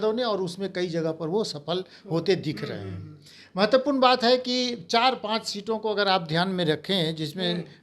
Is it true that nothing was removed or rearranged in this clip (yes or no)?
yes